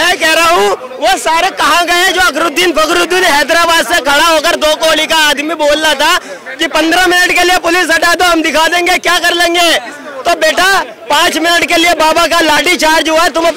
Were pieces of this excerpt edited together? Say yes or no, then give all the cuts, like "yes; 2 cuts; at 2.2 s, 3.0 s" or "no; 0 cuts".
no; 0 cuts